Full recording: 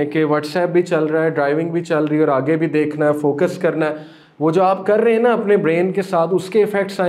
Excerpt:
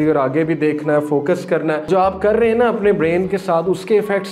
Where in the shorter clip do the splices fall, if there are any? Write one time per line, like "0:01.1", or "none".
0:01.9